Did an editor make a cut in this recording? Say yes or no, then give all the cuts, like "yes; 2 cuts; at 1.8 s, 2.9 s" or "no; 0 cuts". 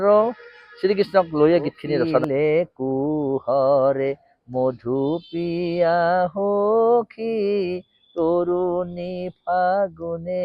yes; 1 cut; at 2.2 s